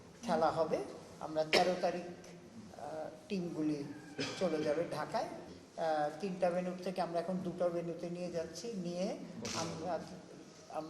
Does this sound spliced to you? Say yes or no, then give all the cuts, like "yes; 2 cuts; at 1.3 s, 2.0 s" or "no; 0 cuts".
yes; 1 cut; at 5.5 s